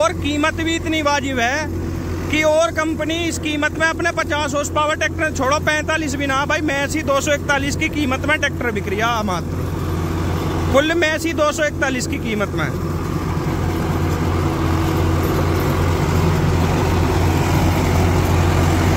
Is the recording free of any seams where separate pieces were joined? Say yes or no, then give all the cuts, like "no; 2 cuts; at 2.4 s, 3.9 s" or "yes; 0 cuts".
yes; 0 cuts